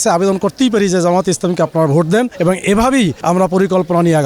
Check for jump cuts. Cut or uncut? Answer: cut